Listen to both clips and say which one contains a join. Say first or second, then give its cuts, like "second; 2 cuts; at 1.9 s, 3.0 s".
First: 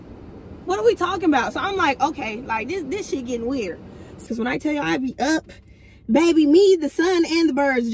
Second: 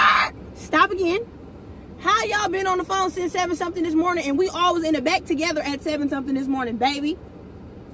first; 1 cut; at 4.2 s